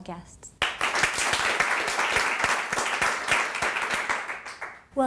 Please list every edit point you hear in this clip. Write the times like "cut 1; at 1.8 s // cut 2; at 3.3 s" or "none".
cut 1; at 3.5 s